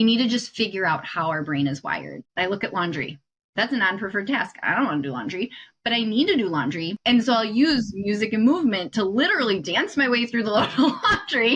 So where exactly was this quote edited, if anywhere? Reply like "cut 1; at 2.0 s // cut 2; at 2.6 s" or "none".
cut 1; at 2.2 s // cut 2; at 6.9 s